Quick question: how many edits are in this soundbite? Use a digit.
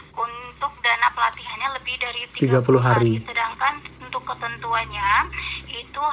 0